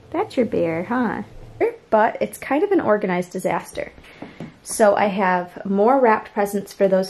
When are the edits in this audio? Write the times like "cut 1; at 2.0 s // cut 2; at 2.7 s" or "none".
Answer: cut 1; at 1.6 s